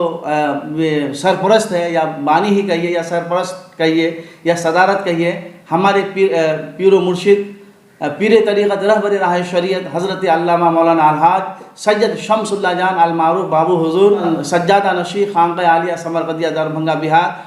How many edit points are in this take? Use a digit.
1